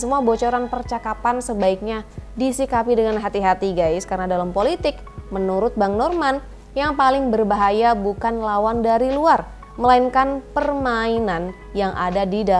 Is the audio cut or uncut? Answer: uncut